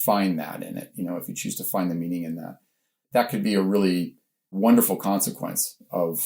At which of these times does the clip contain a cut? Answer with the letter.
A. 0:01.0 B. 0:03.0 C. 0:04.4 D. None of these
C